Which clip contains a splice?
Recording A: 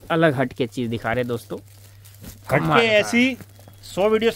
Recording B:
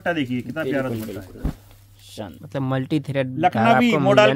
B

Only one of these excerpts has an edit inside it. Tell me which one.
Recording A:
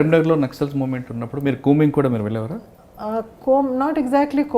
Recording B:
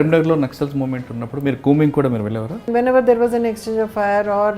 B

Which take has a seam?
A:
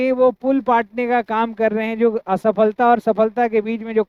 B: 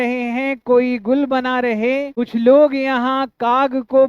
B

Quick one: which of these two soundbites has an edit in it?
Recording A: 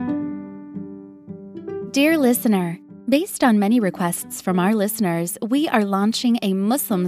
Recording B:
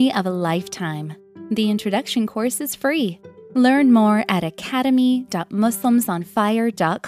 A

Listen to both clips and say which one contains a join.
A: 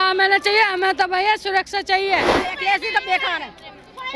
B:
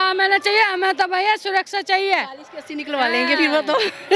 A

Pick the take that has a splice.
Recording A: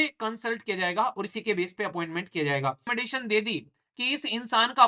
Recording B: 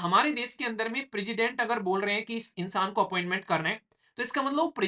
A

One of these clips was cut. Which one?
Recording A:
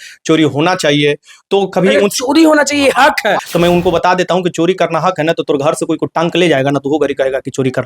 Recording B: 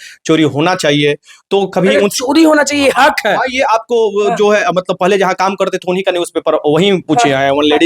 A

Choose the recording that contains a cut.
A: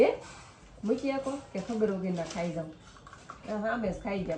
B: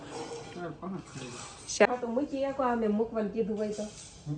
B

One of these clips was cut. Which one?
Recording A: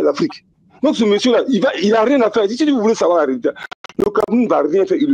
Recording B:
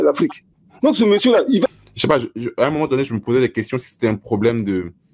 B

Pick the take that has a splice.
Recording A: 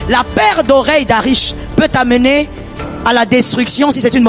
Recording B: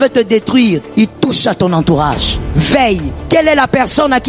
B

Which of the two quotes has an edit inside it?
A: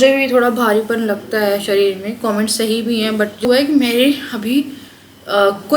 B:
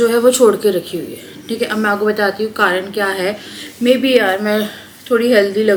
A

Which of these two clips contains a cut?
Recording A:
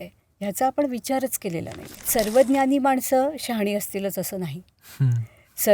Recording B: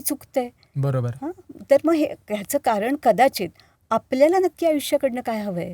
A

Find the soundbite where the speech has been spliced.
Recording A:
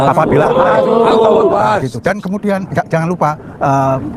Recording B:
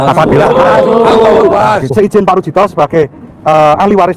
B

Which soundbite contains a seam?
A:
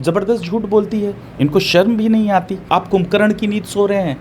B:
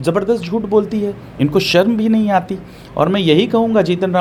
A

